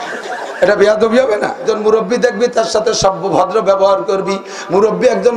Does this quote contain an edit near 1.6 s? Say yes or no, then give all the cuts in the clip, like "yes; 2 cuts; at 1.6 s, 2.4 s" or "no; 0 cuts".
yes; 1 cut; at 1.6 s